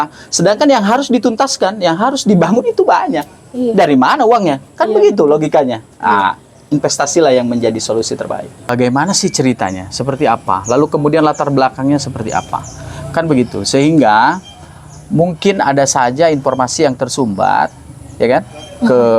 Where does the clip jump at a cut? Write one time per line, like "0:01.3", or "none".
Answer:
0:08.6